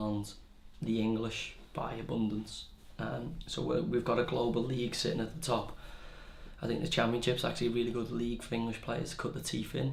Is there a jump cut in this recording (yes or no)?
no